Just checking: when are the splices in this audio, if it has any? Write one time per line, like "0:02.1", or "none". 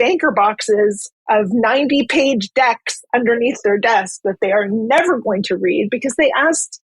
0:01.1